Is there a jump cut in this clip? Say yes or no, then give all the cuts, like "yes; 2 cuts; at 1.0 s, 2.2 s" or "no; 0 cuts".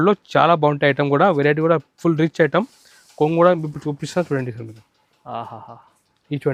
no; 0 cuts